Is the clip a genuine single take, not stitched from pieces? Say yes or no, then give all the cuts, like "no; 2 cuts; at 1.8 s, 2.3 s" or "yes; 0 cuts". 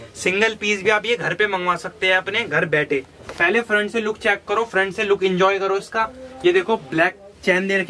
no; 1 cut; at 3.2 s